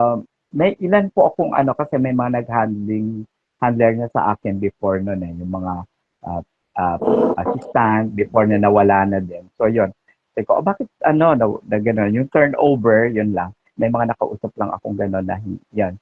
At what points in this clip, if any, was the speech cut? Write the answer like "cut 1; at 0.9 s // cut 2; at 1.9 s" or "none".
none